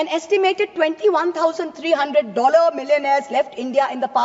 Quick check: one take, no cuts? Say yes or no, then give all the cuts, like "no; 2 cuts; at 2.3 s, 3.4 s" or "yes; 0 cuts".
yes; 0 cuts